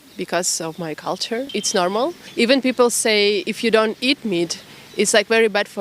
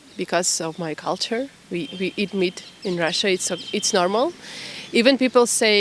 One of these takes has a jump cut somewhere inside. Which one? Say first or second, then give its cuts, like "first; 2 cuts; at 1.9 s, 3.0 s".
first; 1 cut; at 1.8 s